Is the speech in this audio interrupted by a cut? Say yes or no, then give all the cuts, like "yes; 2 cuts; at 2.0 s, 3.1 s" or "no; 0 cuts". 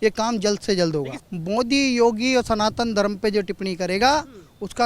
yes; 1 cut; at 1.2 s